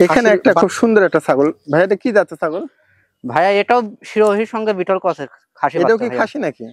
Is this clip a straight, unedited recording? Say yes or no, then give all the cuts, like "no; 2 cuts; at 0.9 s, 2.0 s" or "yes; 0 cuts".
yes; 0 cuts